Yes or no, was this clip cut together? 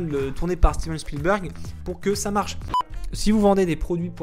yes